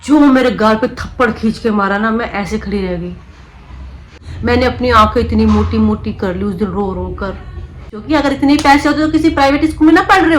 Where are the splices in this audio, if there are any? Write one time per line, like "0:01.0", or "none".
0:04.0
0:07.9